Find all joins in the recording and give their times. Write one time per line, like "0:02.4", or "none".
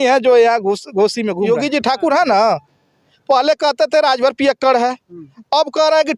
0:01.5